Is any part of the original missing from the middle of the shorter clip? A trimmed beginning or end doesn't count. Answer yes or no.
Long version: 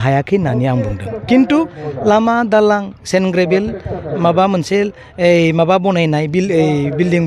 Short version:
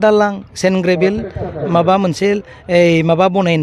no